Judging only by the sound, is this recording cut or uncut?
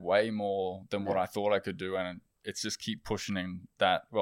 uncut